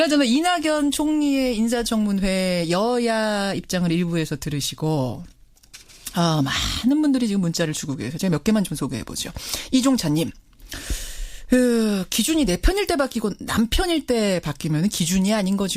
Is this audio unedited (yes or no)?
no